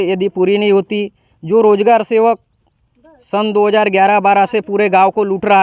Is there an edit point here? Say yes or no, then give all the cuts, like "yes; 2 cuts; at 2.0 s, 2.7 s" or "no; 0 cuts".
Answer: no; 0 cuts